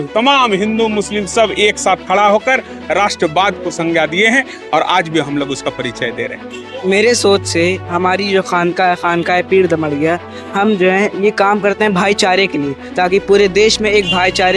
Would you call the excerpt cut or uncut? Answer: cut